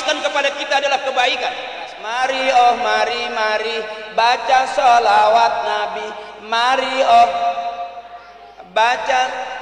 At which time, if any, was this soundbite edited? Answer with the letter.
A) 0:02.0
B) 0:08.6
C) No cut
A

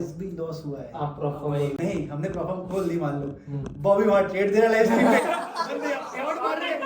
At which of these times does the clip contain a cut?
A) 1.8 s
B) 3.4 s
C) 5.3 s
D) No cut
A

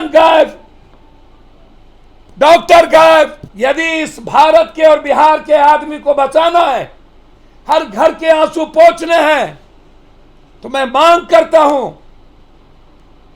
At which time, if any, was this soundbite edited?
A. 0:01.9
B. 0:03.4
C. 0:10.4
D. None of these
B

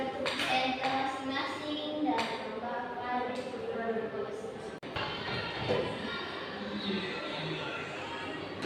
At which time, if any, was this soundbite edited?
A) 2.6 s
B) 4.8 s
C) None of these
B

